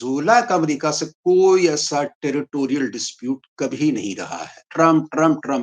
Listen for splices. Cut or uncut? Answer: cut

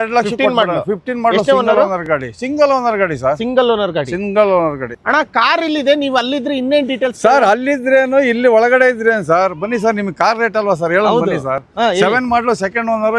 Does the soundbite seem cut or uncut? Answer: uncut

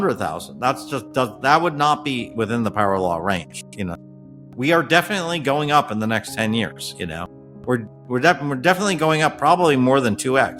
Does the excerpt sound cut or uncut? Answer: uncut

